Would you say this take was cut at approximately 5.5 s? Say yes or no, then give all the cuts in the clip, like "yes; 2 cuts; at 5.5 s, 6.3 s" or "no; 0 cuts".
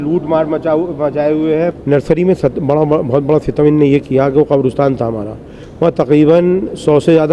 no; 1 cut; at 1.8 s